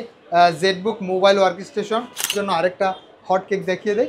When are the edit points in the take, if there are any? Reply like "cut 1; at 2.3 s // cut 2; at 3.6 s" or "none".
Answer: cut 1; at 2.3 s